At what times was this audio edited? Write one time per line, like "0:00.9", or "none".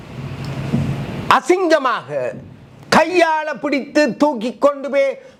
none